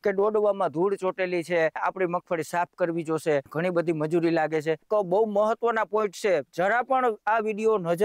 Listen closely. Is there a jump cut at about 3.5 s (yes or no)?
yes